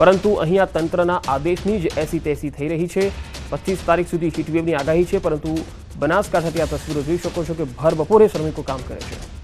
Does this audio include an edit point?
no; 0 cuts

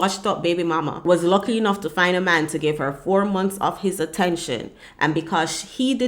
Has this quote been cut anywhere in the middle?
yes; 1 cut; at 1.0 s

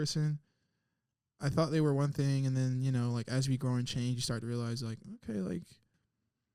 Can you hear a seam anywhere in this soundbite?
no; 0 cuts

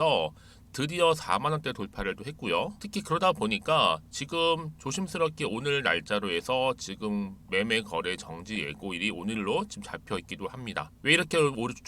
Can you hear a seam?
yes; 2 cuts; at 2.8 s, 10.9 s

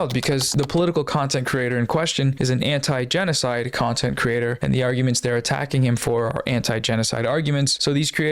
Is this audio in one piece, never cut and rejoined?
yes; 0 cuts

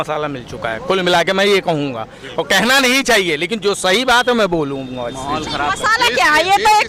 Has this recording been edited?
no; 0 cuts

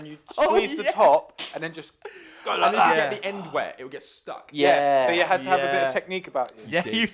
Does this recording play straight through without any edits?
yes; 0 cuts

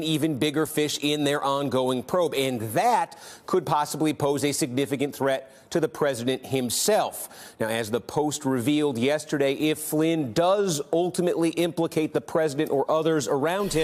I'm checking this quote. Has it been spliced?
no; 0 cuts

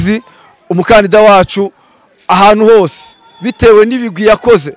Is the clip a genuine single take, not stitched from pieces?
yes; 0 cuts

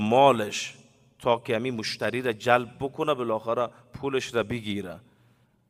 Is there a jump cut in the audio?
no; 0 cuts

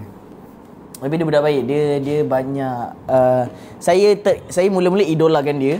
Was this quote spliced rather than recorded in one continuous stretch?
no; 0 cuts

